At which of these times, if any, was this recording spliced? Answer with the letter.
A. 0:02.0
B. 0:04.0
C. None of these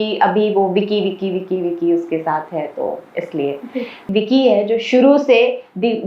B